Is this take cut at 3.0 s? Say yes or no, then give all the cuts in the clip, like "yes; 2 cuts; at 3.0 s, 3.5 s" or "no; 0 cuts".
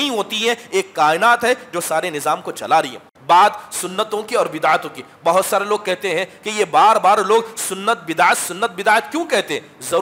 yes; 1 cut; at 3.0 s